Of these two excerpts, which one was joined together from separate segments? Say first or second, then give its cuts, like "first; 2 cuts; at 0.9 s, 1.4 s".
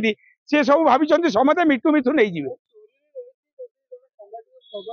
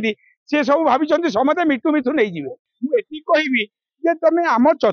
second; 1 cut; at 2.7 s